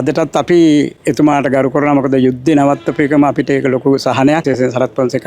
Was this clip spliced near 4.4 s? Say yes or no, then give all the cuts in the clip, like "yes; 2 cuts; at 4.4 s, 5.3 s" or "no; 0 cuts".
yes; 2 cuts; at 1.0 s, 4.4 s